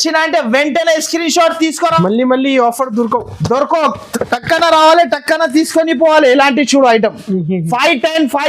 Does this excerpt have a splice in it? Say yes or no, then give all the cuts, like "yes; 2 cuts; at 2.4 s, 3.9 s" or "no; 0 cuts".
yes; 1 cut; at 1.9 s